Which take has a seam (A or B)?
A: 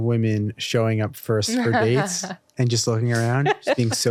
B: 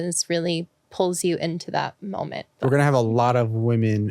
B